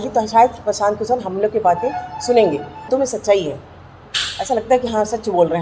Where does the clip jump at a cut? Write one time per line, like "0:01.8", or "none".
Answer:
0:02.9